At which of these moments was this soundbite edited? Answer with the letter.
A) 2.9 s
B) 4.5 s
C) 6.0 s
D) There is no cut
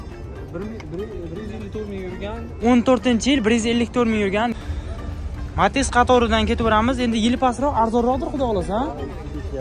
B